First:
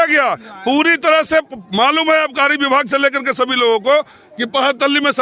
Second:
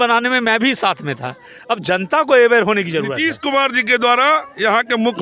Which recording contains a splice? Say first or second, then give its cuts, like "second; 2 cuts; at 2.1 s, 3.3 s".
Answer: second; 1 cut; at 3.3 s